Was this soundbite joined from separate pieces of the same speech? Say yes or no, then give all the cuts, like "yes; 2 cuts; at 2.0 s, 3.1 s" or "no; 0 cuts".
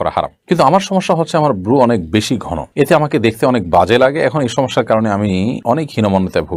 no; 0 cuts